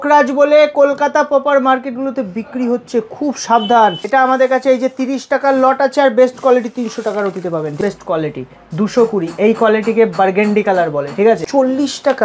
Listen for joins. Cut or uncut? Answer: cut